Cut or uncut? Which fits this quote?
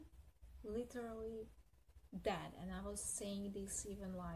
uncut